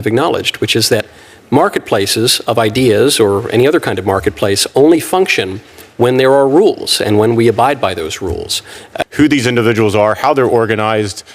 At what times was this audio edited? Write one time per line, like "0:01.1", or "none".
0:08.8